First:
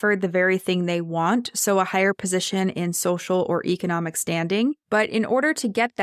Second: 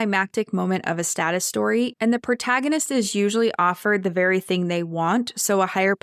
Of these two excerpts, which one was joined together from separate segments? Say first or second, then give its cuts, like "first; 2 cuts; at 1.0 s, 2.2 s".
first; 1 cut; at 4.8 s